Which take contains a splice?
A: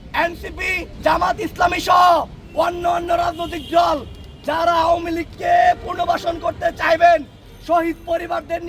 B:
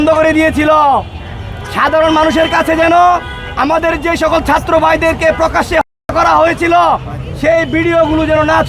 A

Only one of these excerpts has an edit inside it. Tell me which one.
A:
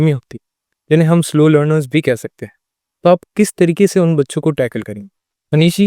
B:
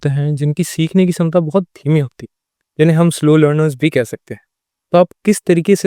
A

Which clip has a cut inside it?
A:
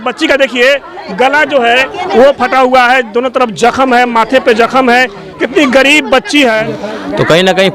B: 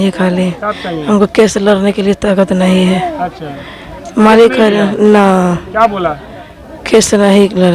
A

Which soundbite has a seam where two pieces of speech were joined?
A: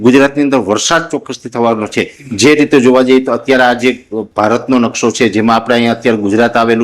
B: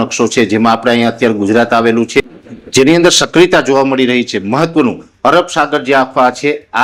A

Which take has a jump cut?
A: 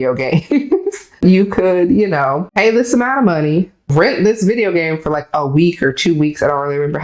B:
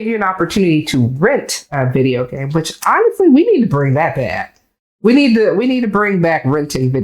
A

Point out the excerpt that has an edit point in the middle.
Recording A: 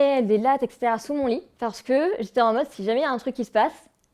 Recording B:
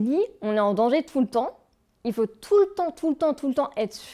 A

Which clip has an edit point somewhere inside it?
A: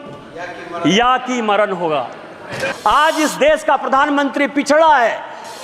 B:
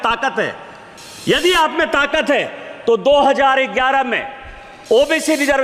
A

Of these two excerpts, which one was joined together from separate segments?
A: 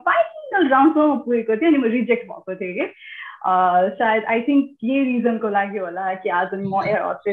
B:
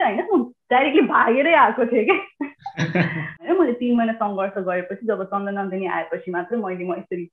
B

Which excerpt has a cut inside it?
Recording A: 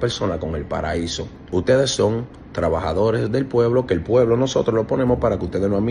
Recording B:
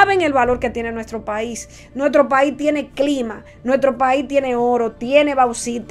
A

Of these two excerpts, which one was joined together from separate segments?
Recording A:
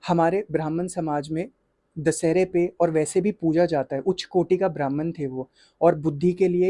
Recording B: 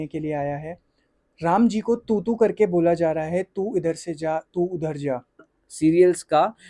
B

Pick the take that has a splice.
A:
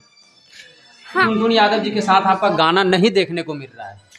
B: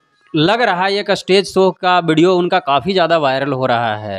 A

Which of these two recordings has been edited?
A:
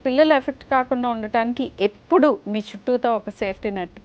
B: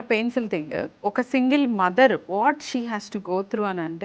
B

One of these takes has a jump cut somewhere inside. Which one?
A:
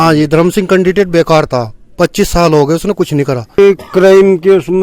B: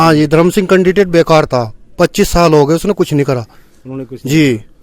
A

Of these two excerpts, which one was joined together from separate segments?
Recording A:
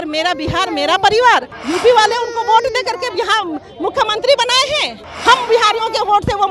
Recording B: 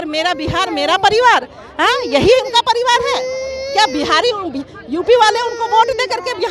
A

